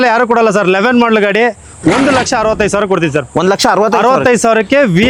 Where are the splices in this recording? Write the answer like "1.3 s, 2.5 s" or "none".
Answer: none